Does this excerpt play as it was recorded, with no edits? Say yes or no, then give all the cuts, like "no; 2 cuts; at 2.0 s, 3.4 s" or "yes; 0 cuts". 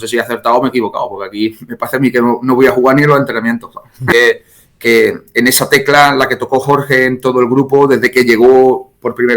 no; 1 cut; at 4.1 s